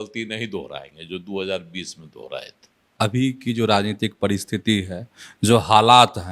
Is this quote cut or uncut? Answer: cut